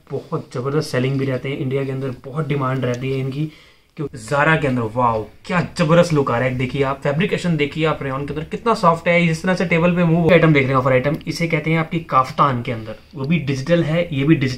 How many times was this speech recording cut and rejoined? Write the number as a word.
two